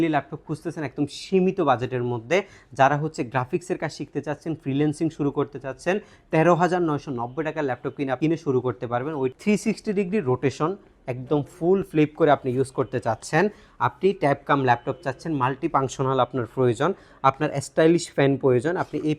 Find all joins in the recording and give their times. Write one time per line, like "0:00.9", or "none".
0:09.3